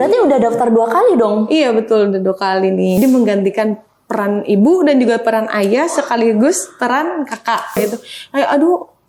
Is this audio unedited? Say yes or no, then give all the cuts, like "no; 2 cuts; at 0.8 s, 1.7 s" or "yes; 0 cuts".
no; 2 cuts; at 3.0 s, 7.8 s